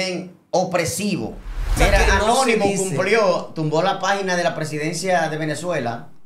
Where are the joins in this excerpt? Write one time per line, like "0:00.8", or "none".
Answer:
0:01.8